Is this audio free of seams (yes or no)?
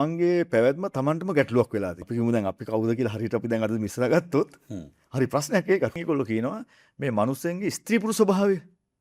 no